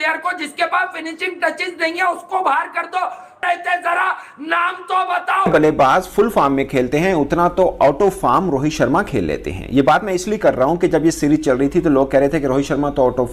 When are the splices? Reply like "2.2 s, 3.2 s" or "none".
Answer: 3.4 s, 5.5 s